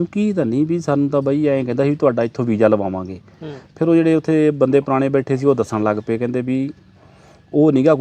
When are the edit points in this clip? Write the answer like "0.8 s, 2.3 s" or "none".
none